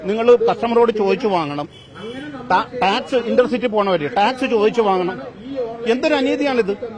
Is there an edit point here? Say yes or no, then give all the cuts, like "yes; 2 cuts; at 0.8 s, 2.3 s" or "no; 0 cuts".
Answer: no; 0 cuts